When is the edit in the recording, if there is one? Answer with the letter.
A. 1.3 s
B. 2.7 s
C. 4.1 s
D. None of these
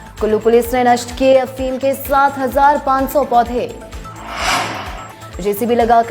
C